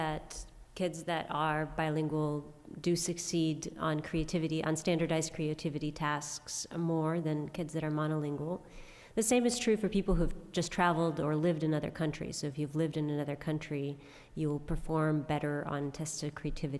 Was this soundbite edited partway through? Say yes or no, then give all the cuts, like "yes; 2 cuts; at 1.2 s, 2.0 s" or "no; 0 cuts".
yes; 1 cut; at 13.3 s